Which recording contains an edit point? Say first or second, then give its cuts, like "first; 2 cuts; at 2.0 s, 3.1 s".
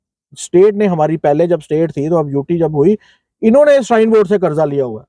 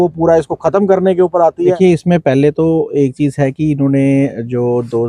second; 1 cut; at 1.8 s